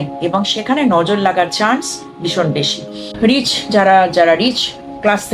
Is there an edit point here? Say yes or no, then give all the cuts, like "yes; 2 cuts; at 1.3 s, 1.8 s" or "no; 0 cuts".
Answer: yes; 1 cut; at 3.1 s